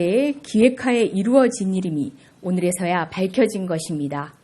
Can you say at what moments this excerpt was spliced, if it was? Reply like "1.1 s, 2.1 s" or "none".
2.7 s